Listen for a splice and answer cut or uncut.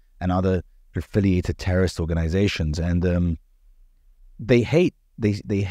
uncut